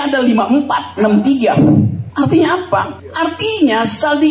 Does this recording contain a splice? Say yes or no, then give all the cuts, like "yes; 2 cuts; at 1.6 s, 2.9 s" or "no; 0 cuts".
yes; 2 cuts; at 2.0 s, 3.0 s